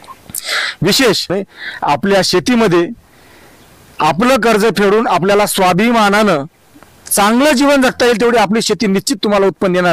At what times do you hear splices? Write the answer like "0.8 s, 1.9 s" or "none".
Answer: 1.3 s